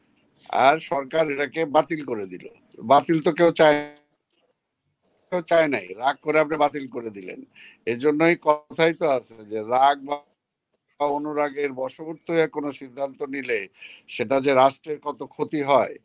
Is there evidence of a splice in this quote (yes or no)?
no